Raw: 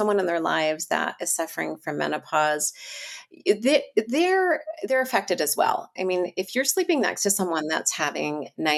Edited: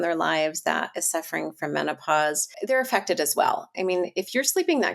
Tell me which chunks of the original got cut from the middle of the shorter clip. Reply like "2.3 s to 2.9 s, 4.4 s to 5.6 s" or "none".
2.8 s to 4.7 s